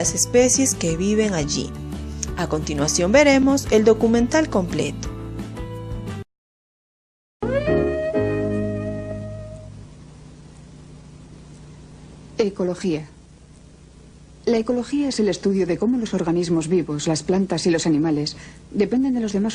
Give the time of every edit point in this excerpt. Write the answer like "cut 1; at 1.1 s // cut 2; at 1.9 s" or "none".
none